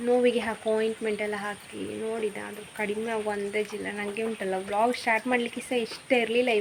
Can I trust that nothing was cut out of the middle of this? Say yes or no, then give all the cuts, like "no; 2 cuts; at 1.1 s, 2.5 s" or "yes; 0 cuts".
yes; 0 cuts